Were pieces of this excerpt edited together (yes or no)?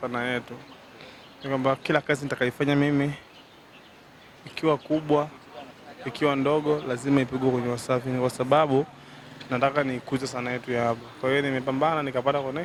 no